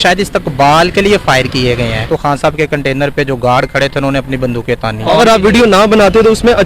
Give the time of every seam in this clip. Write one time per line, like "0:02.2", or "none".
0:02.0
0:05.0